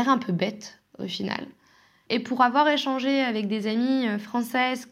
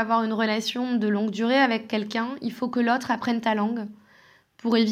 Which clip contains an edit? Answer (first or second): first